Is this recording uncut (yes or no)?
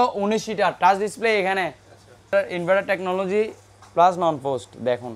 no